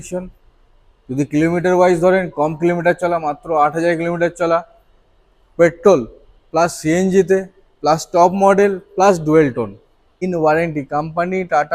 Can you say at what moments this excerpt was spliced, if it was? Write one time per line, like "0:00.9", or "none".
0:10.2